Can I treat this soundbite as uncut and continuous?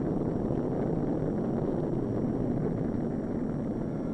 no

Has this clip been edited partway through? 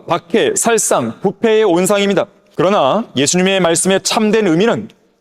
yes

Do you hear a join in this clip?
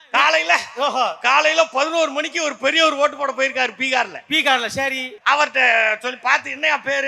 yes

